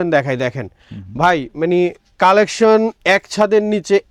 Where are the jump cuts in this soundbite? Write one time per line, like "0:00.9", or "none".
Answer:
none